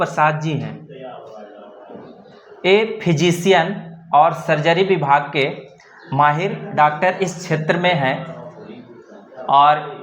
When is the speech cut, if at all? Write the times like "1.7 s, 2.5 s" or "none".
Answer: none

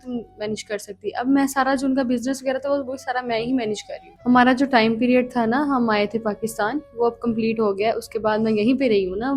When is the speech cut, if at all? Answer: 4.1 s

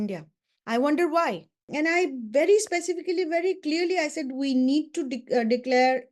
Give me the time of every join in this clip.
1.7 s

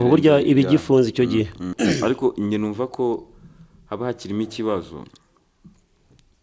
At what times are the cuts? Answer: 1.7 s

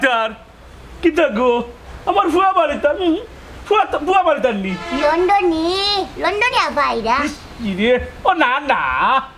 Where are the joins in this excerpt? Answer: none

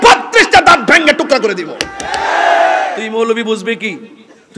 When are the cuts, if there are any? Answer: 3.0 s

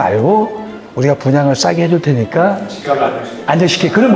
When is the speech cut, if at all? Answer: none

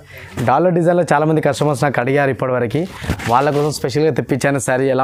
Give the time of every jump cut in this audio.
none

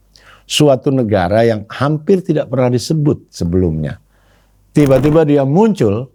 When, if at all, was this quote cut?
none

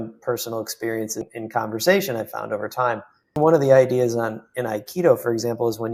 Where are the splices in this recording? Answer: 1.2 s, 3.4 s

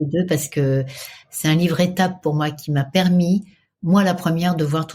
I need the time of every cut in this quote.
1.2 s

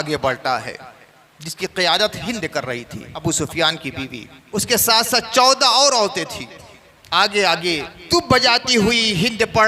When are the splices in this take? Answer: 3.2 s, 4.3 s, 7.9 s

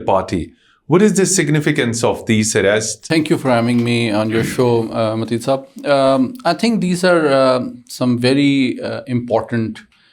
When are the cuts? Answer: none

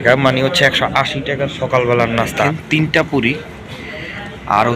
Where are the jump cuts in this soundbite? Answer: 2.4 s

